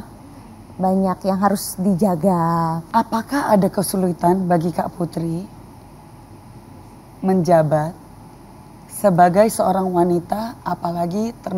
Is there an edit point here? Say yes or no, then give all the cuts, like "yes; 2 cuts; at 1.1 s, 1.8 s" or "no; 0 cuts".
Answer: yes; 1 cut; at 2.8 s